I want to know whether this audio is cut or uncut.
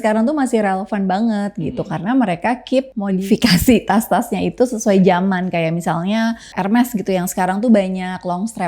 uncut